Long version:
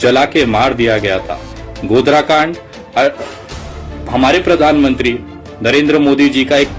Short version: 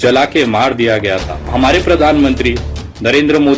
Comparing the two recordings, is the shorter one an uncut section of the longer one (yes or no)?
no